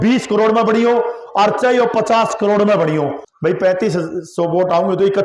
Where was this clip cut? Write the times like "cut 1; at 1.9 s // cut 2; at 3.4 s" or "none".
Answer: cut 1; at 3.2 s